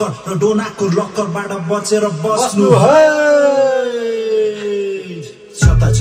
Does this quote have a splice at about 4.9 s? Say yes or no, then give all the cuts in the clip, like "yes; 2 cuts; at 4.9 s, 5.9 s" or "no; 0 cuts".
no; 0 cuts